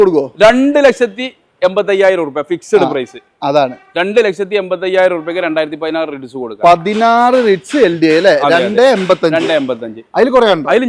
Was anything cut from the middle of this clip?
no; 0 cuts

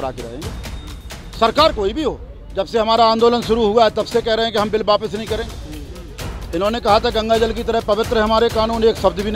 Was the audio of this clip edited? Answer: yes; 1 cut; at 2.3 s

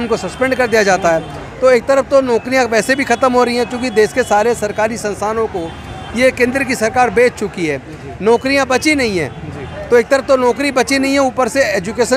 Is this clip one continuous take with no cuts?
yes; 0 cuts

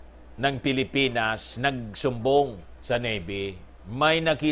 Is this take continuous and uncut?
no; 1 cut; at 2.7 s

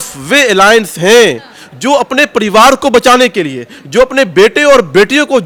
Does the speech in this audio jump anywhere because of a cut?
no; 0 cuts

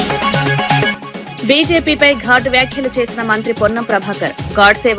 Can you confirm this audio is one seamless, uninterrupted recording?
no; 1 cut; at 1.0 s

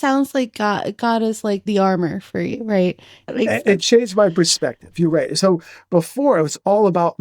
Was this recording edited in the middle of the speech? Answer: yes; 2 cuts; at 1.6 s, 3.3 s

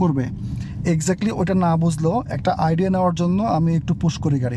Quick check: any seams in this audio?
no; 0 cuts

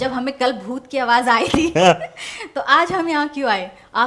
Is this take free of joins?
yes; 0 cuts

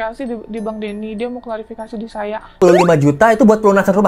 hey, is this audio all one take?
no; 1 cut; at 2.6 s

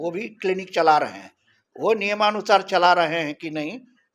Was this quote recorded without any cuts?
yes; 0 cuts

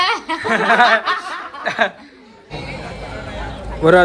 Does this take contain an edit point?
yes; 1 cut; at 2.4 s

